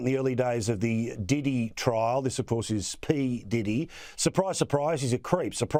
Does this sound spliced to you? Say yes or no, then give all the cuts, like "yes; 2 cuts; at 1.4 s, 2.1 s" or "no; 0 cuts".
no; 0 cuts